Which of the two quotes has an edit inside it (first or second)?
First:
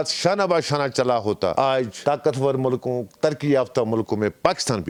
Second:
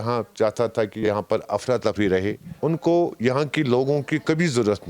second